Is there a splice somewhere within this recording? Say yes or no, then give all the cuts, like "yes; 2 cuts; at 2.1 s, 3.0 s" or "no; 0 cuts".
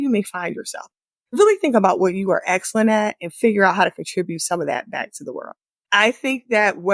yes; 1 cut; at 1.3 s